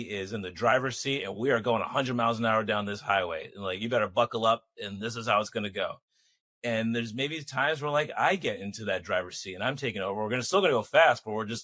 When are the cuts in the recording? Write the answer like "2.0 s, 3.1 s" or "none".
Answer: none